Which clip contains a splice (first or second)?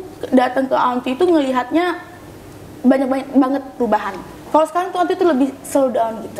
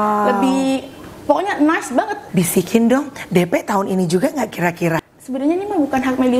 second